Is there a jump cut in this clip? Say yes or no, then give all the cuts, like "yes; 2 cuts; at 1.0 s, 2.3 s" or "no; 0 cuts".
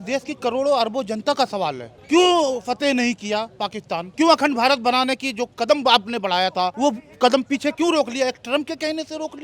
yes; 3 cuts; at 1.9 s, 4.1 s, 6.7 s